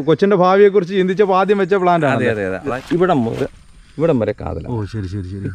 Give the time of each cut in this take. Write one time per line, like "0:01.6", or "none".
0:02.8

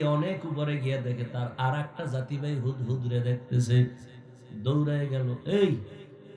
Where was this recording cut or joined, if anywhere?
none

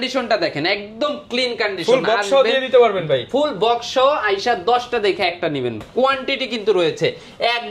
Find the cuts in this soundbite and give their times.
0:05.8

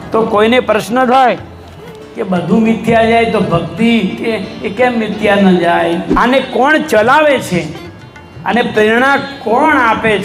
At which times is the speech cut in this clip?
0:06.1

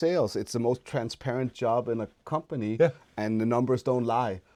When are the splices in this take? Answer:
none

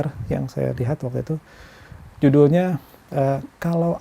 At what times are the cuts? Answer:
none

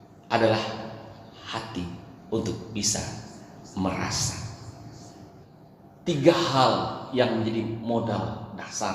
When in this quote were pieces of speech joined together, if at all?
0:05.5

